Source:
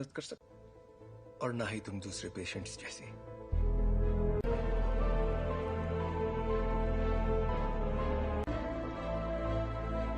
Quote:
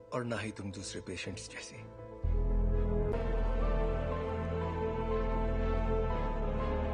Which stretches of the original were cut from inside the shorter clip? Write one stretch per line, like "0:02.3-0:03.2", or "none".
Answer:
0:04.4-0:04.5